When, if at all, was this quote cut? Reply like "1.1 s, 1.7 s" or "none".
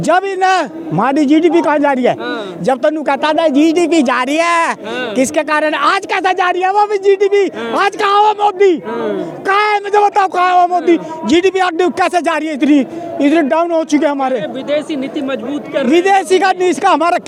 none